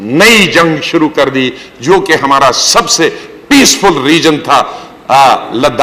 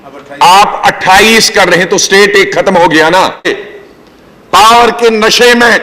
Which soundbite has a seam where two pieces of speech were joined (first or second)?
second